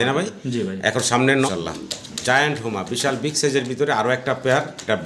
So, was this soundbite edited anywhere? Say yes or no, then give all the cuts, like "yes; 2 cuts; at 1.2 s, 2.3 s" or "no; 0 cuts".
yes; 1 cut; at 1.5 s